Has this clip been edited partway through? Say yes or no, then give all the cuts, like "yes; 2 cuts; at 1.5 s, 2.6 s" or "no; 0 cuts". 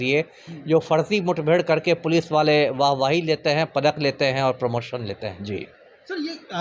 no; 0 cuts